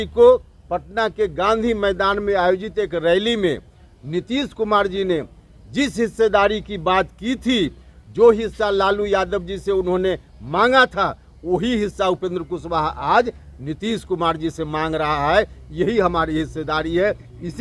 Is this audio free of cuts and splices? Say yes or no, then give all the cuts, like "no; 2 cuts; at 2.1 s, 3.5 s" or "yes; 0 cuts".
yes; 0 cuts